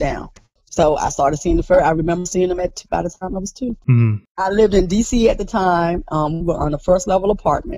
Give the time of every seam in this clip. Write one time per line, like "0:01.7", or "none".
none